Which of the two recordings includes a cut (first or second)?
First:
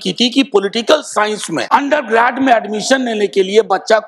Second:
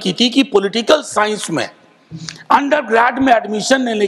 first